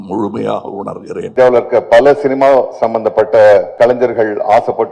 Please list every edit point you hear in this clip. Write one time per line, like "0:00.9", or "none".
0:01.2
0:03.7

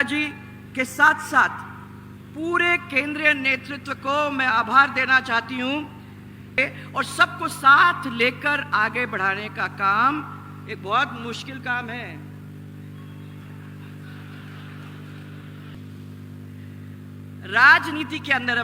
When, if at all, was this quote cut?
0:06.6
0:15.9

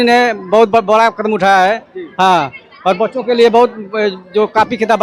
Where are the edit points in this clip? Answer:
none

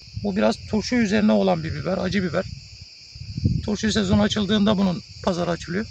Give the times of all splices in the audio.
none

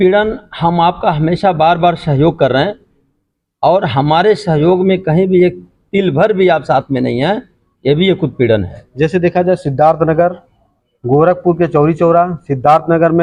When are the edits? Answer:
none

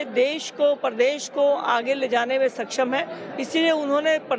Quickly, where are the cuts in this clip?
none

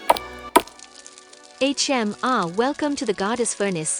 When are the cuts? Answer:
0:00.9

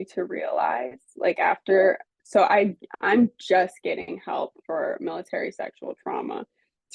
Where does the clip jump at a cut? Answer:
none

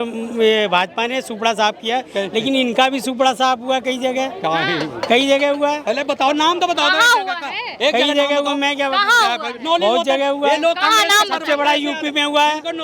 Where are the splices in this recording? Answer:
none

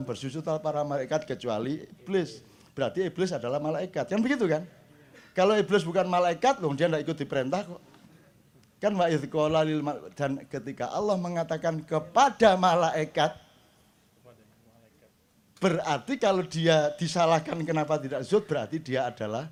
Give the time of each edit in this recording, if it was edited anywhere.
none

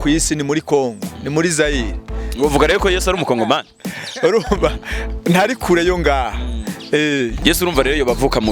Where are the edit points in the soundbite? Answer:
0:07.4

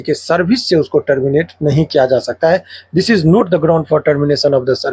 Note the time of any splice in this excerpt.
none

